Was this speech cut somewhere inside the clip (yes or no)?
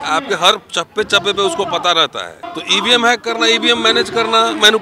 yes